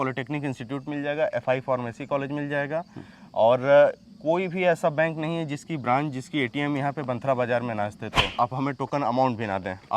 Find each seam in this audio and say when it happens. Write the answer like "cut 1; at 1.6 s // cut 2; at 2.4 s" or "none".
cut 1; at 8.3 s